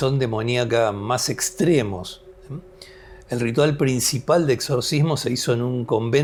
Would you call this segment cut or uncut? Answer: uncut